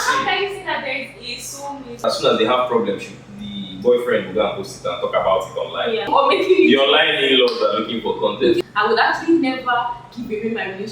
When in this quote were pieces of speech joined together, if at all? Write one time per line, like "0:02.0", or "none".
0:02.0
0:06.1
0:08.6